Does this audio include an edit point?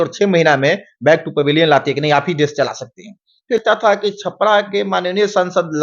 yes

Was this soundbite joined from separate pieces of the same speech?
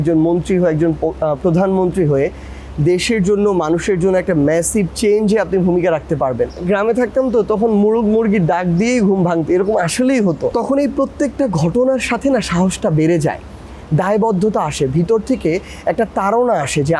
yes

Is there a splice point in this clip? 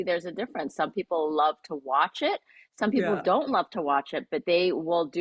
no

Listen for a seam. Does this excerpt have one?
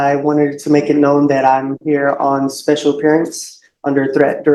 no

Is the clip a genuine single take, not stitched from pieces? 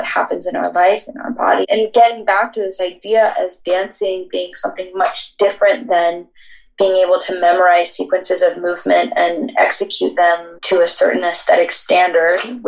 no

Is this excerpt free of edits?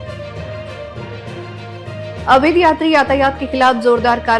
no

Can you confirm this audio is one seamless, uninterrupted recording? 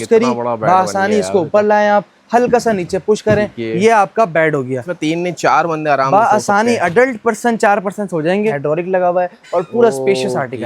no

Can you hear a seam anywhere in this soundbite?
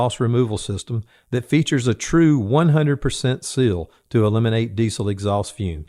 no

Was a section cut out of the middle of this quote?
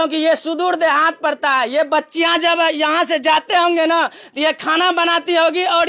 no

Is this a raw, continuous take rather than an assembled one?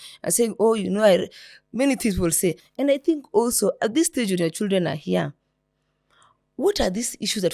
no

